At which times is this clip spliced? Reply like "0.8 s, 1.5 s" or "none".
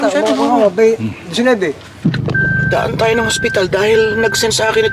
2.0 s